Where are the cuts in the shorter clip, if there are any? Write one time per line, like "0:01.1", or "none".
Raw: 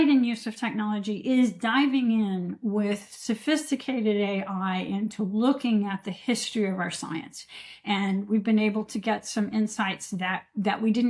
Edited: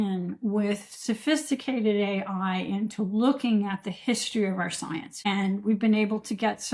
0:05.1